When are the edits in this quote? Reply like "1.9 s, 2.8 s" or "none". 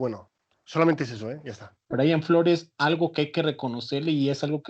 1.8 s